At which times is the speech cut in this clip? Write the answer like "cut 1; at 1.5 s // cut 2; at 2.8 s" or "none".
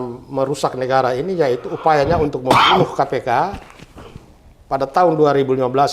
none